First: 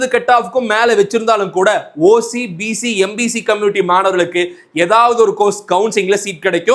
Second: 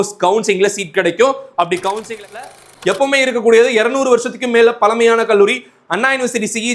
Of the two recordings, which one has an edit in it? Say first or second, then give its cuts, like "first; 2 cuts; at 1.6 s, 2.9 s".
second; 1 cut; at 2.5 s